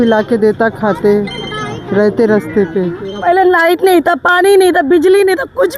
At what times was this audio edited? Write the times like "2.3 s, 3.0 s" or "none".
3.2 s